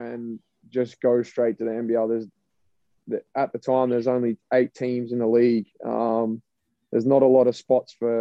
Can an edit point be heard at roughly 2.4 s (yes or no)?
no